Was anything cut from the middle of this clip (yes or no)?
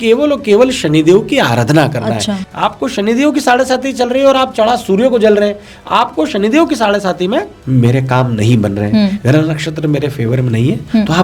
yes